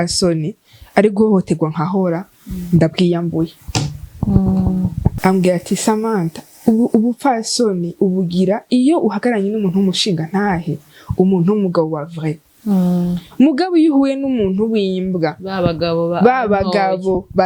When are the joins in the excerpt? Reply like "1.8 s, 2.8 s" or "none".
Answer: 5.1 s